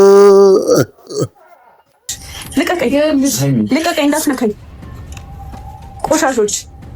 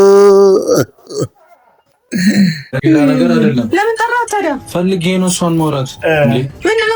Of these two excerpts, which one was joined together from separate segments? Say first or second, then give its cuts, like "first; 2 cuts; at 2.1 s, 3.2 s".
first; 1 cut; at 2.1 s